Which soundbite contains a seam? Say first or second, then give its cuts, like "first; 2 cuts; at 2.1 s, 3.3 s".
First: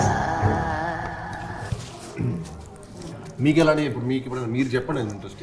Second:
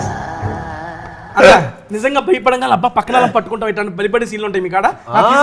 second; 1 cut; at 1.2 s